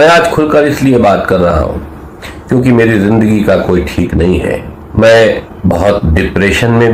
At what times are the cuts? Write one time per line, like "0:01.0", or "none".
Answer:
0:04.8
0:05.5